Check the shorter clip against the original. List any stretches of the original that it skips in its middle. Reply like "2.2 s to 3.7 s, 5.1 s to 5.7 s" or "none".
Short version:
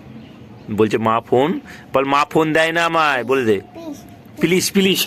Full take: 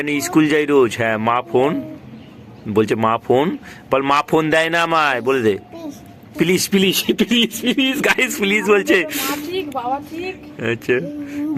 none